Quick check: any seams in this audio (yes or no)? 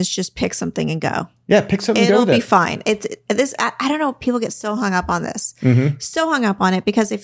no